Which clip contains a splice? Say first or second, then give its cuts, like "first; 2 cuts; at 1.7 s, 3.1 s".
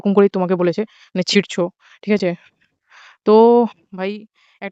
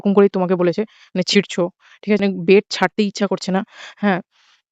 second; 1 cut; at 2.2 s